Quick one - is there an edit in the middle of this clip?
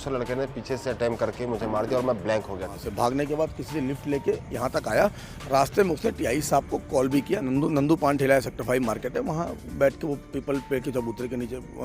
yes; 2 cuts; at 2.8 s, 7.4 s

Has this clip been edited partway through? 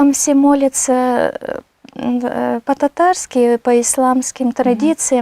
no; 0 cuts

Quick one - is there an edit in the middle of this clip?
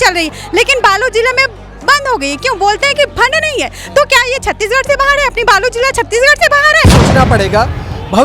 yes; 1 cut; at 6.9 s

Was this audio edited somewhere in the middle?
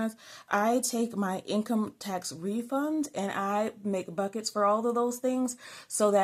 no; 0 cuts

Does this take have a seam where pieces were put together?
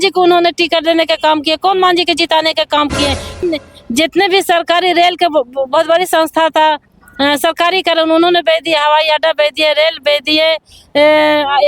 yes; 1 cut; at 3.4 s

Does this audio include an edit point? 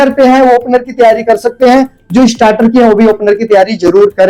no; 0 cuts

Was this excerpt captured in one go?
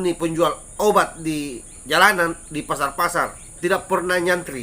no; 1 cut; at 3.5 s

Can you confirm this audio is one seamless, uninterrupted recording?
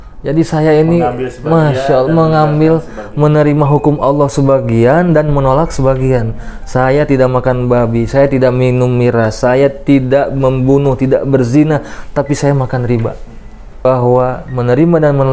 no; 1 cut; at 13.8 s

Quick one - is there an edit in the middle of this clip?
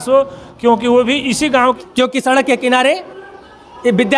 yes; 1 cut; at 1.6 s

